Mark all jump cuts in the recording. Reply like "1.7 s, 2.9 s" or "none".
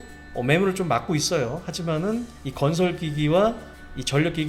2.4 s